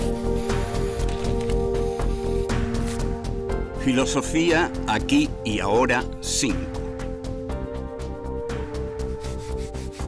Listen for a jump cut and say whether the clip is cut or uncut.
cut